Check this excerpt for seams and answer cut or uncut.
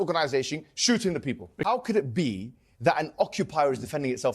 cut